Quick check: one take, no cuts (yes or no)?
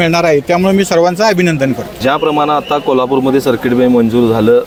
yes